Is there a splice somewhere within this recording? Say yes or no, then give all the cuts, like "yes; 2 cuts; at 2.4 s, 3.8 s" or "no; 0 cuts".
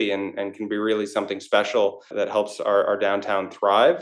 yes; 1 cut; at 2.1 s